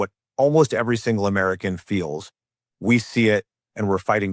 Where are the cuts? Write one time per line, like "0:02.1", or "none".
0:02.6